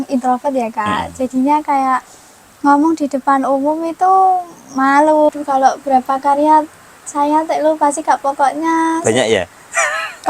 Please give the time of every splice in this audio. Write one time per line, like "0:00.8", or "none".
0:05.3